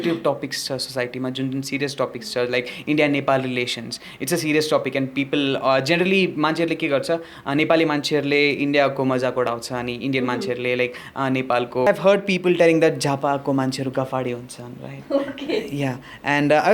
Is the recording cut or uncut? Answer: cut